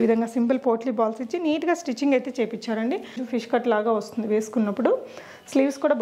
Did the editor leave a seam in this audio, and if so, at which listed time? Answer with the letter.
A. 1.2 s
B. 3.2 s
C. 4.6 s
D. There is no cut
B